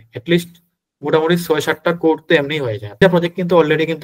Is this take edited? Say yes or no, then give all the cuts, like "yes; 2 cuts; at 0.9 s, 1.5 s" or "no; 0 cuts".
yes; 1 cut; at 3.0 s